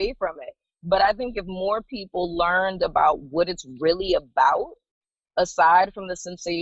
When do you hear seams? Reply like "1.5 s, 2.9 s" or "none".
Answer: none